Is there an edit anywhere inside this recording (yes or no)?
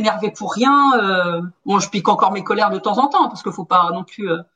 no